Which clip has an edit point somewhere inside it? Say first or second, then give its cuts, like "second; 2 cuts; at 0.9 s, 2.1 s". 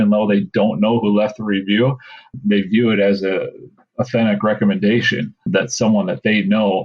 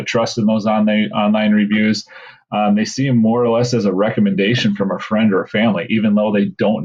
first; 2 cuts; at 2.3 s, 5.5 s